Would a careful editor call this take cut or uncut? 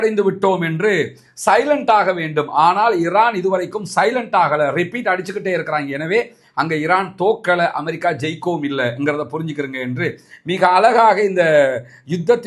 uncut